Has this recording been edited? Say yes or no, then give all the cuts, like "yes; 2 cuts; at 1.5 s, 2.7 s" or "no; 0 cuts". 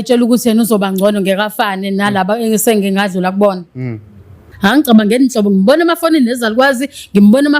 yes; 1 cut; at 4.4 s